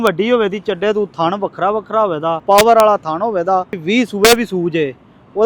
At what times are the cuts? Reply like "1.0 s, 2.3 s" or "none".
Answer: 2.4 s, 3.8 s

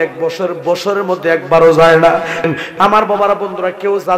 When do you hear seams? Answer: 2.5 s

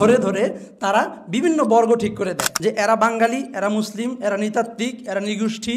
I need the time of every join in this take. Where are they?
2.4 s

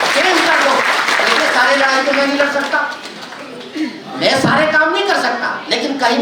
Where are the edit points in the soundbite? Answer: none

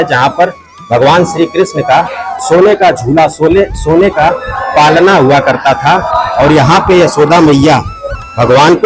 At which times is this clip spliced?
none

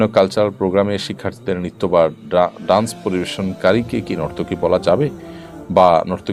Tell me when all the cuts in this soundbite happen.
none

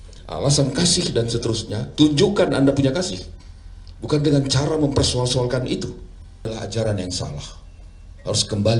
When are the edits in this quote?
6.5 s

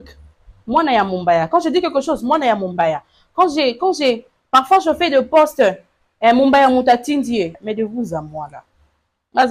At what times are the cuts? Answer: 7.6 s

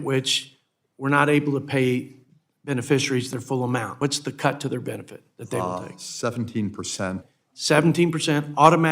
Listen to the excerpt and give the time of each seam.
3.9 s, 7.2 s

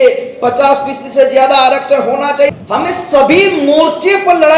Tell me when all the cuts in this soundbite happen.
2.5 s

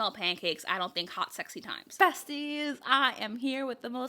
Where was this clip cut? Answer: 1.8 s

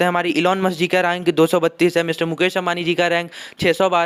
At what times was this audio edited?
none

